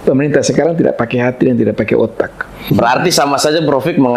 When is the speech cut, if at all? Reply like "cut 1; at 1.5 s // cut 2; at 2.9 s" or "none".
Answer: cut 1; at 2.6 s